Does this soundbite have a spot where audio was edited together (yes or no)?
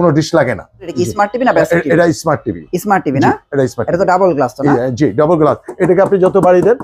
yes